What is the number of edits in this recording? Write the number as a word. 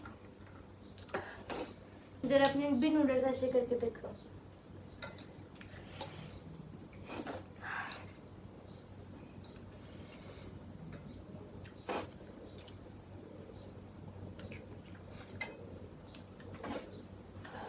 one